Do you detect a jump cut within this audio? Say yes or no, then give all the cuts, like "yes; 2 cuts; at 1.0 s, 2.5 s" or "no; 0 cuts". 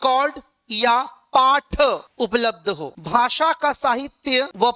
yes; 1 cut; at 3.0 s